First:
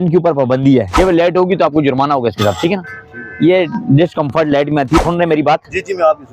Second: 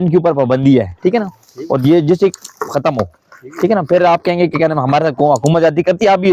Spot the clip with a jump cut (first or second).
first